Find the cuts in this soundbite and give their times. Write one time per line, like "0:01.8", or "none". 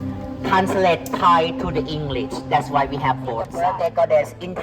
0:03.5